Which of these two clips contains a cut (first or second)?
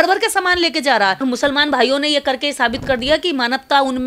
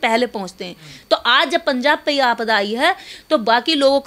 first